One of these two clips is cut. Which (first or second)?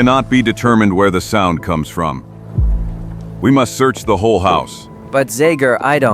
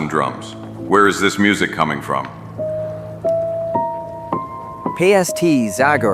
first